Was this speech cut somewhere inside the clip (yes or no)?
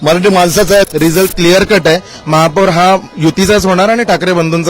yes